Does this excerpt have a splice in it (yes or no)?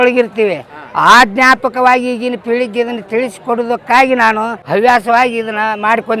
yes